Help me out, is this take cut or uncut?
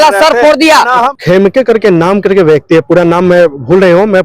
cut